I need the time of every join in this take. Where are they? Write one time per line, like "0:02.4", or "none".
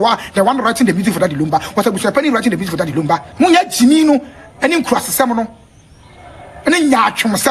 0:03.3